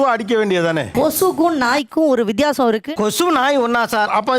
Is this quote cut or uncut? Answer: cut